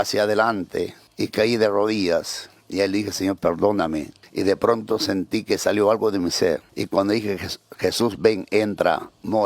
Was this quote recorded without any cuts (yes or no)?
no